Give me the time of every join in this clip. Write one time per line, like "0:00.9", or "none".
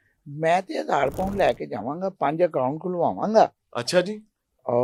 none

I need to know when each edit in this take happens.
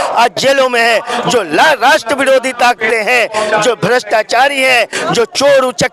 none

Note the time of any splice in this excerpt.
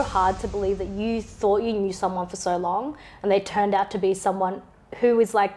none

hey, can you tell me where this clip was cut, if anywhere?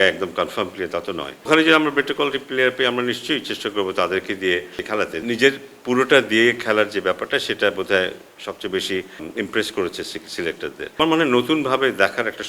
0:01.5
0:05.2
0:09.3
0:11.0

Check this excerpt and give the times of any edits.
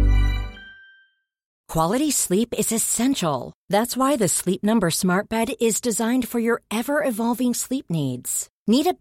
0:01.5

